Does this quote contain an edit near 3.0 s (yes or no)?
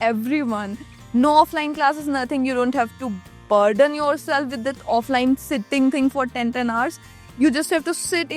no